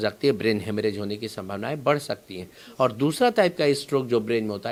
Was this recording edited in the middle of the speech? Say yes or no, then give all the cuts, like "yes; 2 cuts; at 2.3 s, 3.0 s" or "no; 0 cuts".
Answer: no; 0 cuts